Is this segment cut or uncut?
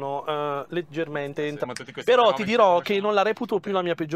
cut